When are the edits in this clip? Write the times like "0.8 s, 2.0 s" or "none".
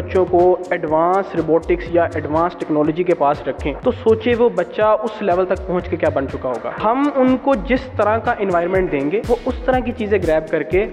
3.7 s, 6.7 s, 9.2 s